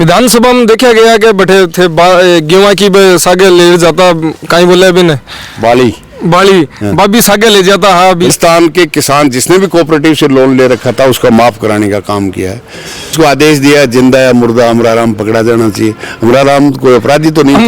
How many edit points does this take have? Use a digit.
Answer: 2